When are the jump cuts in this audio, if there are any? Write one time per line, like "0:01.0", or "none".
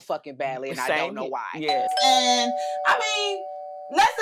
0:01.9